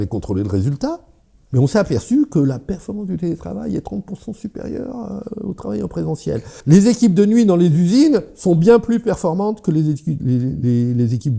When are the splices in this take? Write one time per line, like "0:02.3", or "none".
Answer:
0:01.3
0:06.5